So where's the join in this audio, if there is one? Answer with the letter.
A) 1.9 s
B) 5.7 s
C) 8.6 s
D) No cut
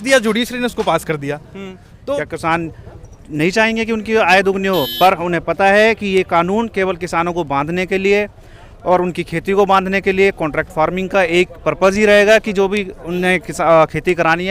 A